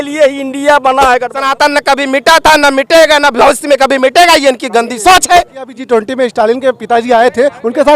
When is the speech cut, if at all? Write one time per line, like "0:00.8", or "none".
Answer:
0:01.4
0:05.8